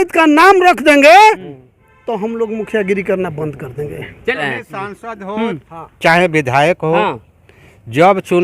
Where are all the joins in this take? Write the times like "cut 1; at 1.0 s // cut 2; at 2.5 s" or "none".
cut 1; at 4.4 s